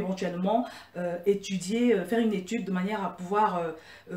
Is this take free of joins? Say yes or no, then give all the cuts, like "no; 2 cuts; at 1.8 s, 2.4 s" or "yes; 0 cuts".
yes; 0 cuts